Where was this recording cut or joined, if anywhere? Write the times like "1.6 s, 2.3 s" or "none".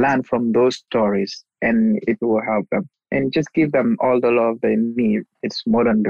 none